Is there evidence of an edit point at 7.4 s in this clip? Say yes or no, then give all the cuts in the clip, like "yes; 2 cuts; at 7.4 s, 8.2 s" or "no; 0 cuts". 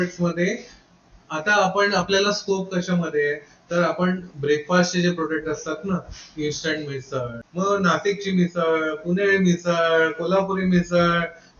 yes; 1 cut; at 7.4 s